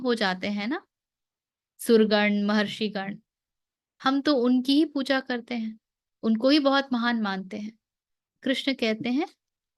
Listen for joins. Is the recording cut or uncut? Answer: uncut